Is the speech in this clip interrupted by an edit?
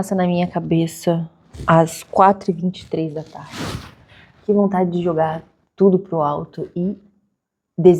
no; 0 cuts

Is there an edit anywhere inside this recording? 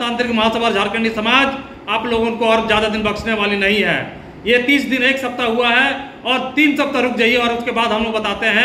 no; 0 cuts

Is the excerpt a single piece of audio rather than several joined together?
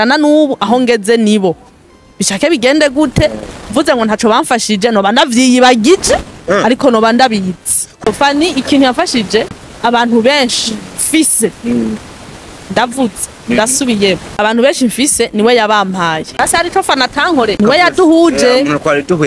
no; 5 cuts; at 8.0 s, 9.5 s, 14.3 s, 16.4 s, 17.6 s

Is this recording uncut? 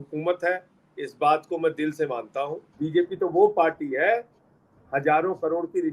no; 1 cut; at 2.6 s

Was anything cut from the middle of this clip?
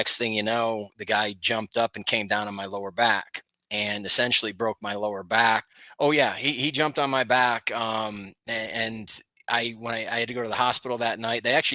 yes; 1 cut; at 5.8 s

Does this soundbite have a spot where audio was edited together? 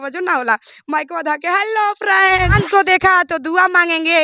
yes; 1 cut; at 2.6 s

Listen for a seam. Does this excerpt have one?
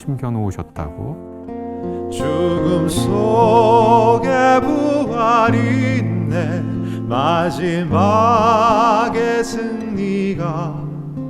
yes; 1 cut; at 1.3 s

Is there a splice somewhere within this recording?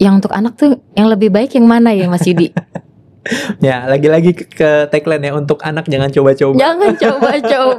no; 0 cuts

